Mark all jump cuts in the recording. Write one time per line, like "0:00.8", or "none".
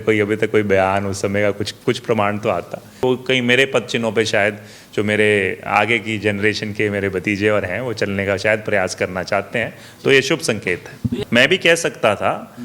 0:03.0
0:11.2